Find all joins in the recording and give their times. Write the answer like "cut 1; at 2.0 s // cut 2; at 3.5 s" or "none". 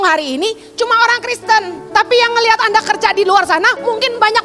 cut 1; at 1.8 s